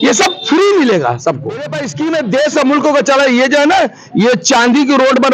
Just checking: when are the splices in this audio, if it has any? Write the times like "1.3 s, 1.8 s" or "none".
1.8 s